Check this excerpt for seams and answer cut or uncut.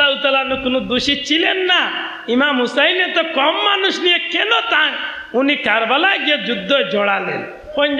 uncut